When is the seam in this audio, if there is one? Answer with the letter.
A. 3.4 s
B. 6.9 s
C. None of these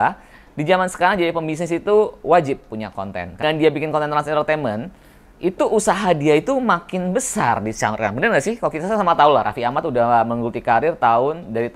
A